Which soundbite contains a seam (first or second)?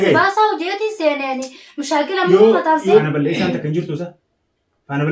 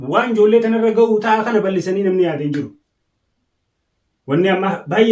first